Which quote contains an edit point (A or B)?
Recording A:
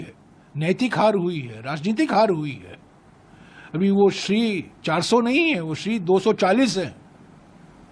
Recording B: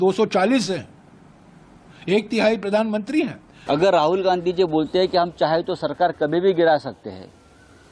B